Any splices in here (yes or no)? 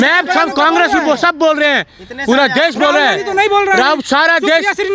no